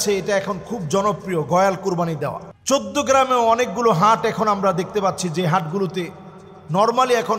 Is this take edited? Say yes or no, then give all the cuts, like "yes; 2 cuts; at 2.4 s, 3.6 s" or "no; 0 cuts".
yes; 1 cut; at 2.5 s